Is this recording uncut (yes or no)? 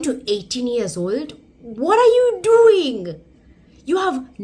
yes